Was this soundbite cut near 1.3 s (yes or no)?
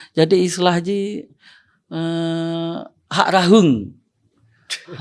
no